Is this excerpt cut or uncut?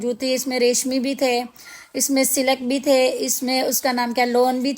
uncut